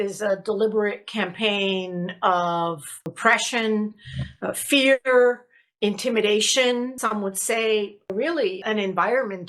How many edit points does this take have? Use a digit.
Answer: 2